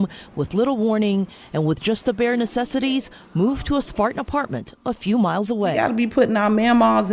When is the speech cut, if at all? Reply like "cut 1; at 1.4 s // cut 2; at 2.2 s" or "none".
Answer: cut 1; at 5.8 s